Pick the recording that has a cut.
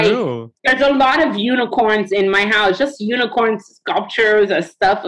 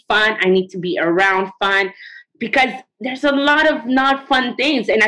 second; 1 cut; at 2.8 s

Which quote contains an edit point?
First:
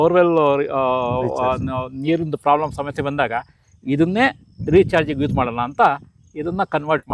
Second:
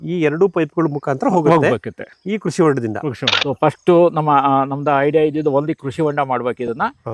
second; 1 cut; at 3.3 s

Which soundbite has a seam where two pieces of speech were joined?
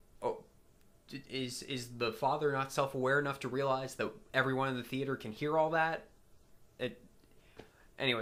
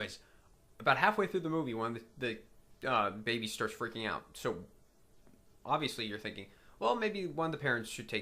second; 1 cut; at 3.5 s

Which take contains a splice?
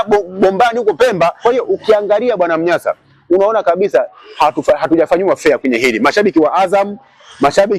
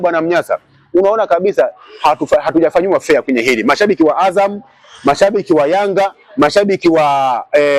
first; 1 cut; at 1.4 s

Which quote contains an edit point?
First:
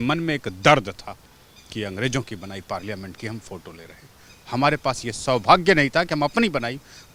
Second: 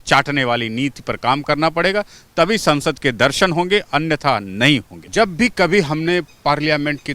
second; 1 cut; at 5.0 s

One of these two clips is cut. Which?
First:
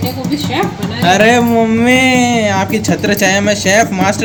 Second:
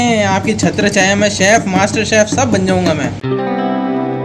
second; 1 cut; at 3.2 s

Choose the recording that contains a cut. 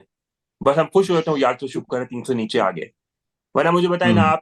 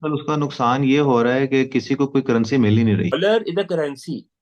second; 1 cut; at 3.1 s

